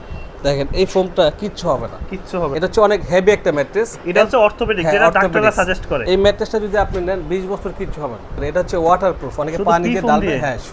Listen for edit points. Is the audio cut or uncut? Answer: cut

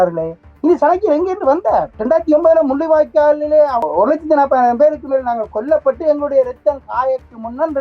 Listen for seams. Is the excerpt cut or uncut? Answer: cut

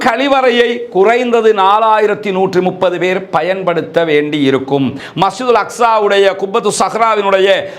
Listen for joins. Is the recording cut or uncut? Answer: cut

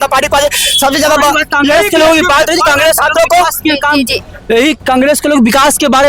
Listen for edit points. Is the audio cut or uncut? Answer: uncut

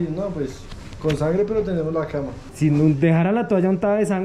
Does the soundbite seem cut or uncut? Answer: cut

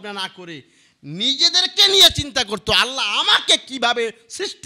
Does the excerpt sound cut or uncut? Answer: uncut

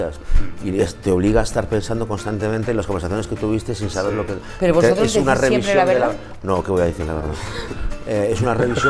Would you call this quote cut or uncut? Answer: uncut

